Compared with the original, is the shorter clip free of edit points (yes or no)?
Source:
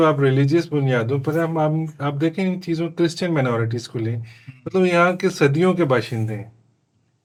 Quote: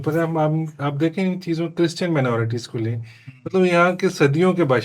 yes